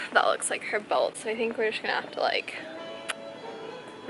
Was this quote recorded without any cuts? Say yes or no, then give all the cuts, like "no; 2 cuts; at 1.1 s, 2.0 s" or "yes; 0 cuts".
yes; 0 cuts